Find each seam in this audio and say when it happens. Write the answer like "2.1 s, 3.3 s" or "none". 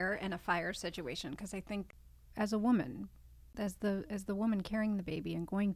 1.9 s, 3.5 s